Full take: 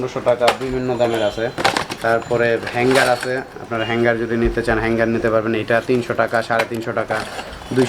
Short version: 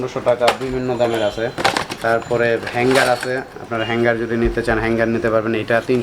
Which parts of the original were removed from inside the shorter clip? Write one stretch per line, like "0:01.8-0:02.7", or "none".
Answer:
none

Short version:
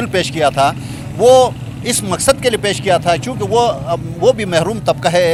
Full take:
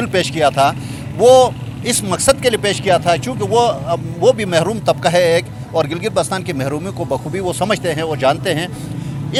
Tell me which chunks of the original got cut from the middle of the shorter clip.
none

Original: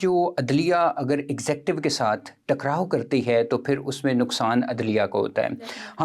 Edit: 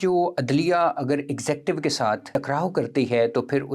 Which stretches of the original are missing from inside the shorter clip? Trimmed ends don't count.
0:02.3-0:02.4

